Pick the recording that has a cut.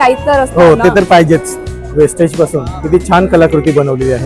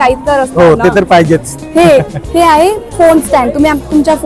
first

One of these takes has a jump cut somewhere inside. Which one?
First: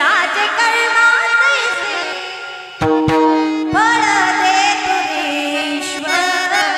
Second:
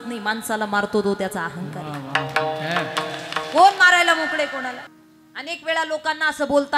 second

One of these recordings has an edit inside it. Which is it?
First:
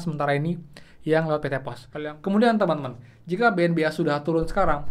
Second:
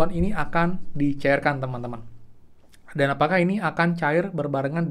first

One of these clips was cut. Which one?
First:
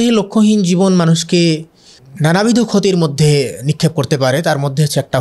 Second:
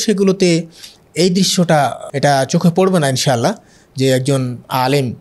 second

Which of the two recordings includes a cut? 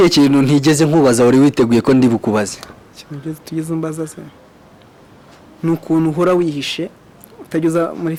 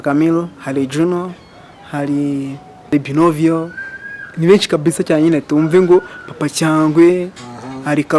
second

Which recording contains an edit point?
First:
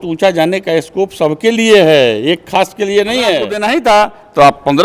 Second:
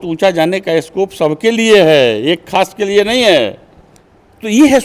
first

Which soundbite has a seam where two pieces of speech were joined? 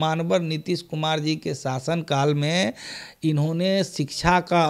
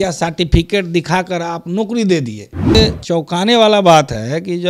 second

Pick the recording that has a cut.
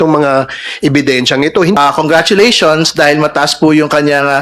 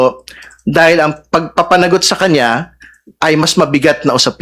first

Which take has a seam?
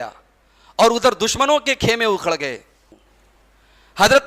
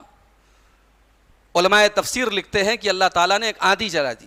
first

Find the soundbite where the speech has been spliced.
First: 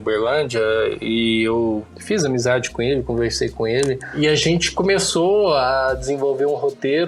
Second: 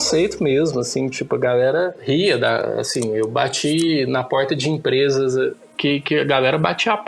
second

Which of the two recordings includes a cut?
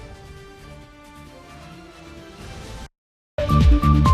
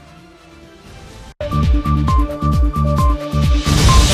first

